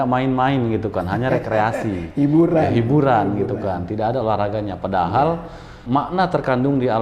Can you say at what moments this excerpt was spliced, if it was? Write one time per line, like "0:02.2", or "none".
0:05.8